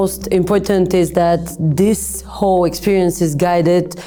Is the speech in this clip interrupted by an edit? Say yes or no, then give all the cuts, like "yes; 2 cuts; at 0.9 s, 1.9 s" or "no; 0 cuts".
no; 0 cuts